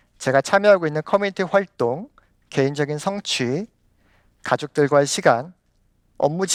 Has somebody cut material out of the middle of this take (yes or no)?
no